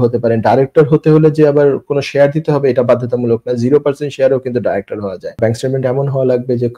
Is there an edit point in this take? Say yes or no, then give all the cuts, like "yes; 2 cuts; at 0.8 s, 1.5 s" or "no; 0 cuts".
yes; 1 cut; at 5.3 s